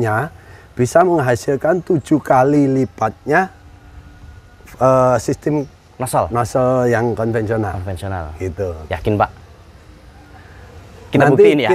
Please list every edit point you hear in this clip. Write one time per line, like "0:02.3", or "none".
none